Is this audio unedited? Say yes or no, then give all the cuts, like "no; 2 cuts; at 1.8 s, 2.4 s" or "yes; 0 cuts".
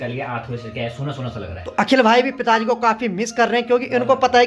no; 1 cut; at 1.6 s